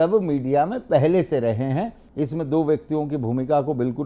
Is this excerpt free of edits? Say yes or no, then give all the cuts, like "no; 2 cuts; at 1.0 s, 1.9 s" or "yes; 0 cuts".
no; 1 cut; at 2.0 s